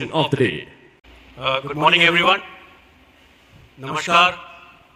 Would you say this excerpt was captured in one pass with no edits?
yes; 0 cuts

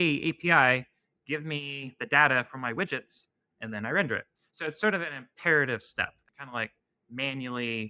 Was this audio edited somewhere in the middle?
no; 0 cuts

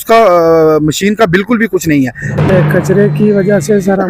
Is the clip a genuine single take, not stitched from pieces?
no; 1 cut; at 2.3 s

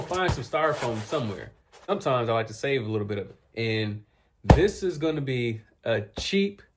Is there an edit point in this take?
yes; 1 cut; at 1.9 s

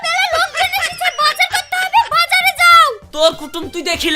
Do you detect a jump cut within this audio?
no; 0 cuts

